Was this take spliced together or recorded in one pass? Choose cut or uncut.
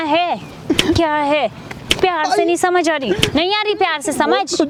uncut